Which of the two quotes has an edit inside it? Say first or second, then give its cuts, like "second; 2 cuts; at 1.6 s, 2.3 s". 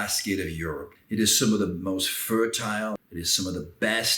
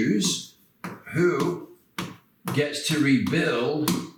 first; 2 cuts; at 0.9 s, 3.1 s